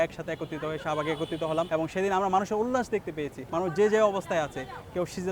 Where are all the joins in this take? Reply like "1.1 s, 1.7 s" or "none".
1.7 s, 3.3 s